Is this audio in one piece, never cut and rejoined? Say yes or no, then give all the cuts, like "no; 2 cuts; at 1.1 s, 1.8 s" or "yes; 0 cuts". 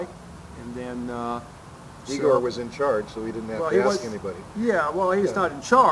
yes; 0 cuts